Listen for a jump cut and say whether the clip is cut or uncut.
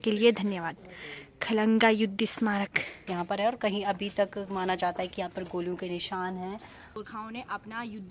cut